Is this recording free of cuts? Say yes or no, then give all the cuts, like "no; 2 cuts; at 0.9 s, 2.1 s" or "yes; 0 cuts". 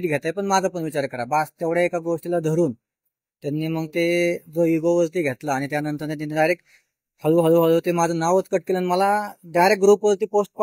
yes; 0 cuts